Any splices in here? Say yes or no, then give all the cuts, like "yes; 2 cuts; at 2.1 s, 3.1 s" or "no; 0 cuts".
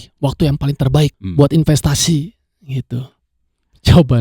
yes; 1 cut; at 1.2 s